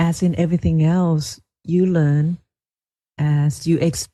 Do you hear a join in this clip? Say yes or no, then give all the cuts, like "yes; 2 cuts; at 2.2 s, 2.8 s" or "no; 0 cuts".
no; 0 cuts